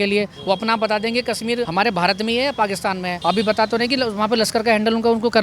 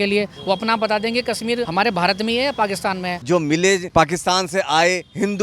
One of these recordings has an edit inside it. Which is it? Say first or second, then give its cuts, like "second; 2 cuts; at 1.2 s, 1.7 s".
second; 1 cut; at 3.2 s